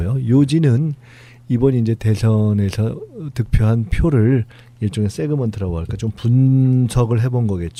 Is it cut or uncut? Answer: uncut